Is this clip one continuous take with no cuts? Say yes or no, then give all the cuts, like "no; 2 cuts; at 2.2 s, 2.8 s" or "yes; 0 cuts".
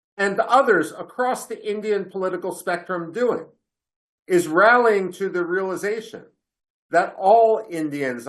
yes; 0 cuts